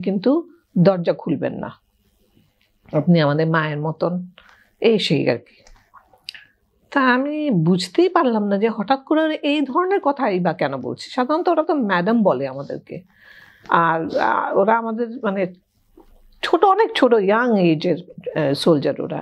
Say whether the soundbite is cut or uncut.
uncut